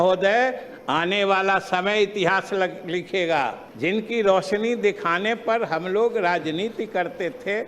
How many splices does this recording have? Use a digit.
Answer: 1